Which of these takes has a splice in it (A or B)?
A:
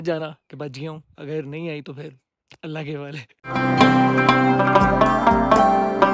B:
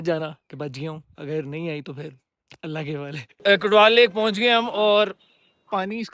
B